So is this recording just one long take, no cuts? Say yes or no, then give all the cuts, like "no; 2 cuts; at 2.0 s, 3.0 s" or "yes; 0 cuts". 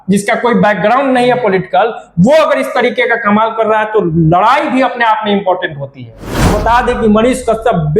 no; 1 cut; at 6.5 s